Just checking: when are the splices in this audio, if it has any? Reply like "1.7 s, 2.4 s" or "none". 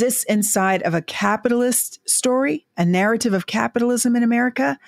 none